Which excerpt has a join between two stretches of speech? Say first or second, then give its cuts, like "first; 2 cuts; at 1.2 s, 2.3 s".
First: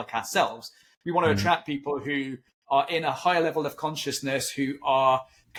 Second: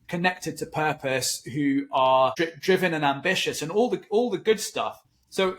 second; 1 cut; at 2.3 s